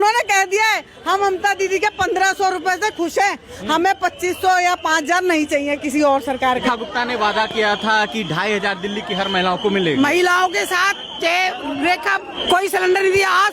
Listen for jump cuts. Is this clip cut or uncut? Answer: cut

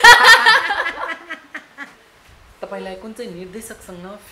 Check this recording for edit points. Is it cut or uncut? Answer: cut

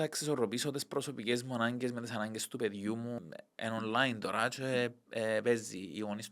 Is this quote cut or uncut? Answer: cut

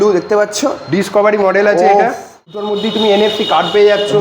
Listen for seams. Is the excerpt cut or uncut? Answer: cut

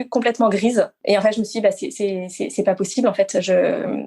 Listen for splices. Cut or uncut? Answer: cut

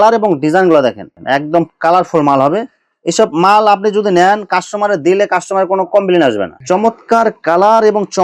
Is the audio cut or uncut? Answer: cut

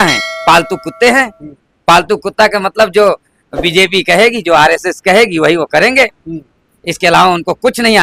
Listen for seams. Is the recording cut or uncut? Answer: uncut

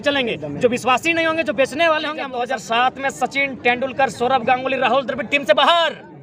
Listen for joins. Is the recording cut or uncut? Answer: cut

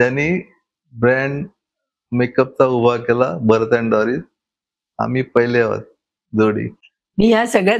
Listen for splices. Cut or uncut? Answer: uncut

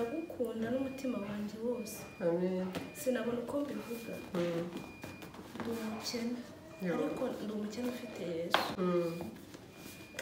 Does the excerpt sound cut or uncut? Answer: uncut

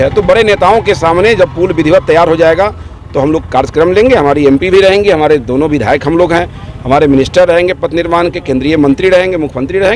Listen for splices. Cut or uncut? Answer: uncut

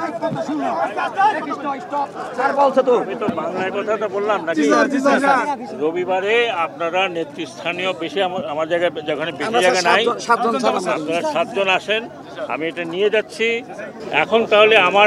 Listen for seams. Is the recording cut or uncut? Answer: cut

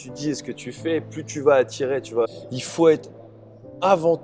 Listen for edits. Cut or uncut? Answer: cut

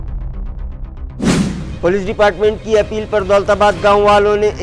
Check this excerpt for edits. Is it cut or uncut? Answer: uncut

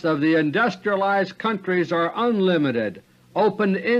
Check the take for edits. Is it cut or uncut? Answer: uncut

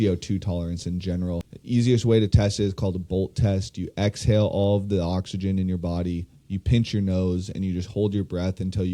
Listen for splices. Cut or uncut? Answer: cut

